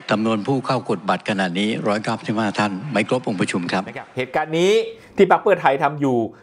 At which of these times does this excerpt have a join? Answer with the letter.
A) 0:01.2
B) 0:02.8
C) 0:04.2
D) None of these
C